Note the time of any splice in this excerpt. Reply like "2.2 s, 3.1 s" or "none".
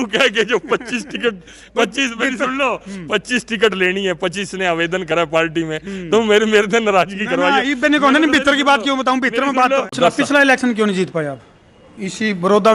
9.9 s